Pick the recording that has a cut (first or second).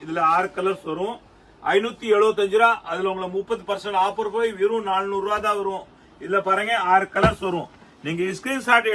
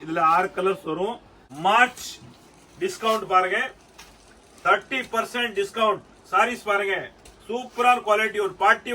second